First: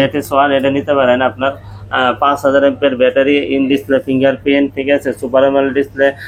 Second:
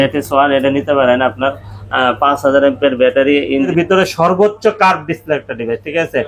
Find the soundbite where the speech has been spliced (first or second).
second